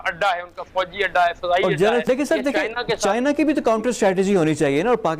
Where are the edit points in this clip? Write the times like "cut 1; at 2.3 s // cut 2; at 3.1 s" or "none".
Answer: cut 1; at 2.0 s